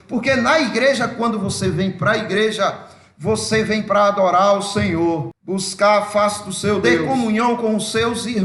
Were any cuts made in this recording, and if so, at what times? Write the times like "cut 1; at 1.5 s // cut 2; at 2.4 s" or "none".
cut 1; at 5.3 s // cut 2; at 7.0 s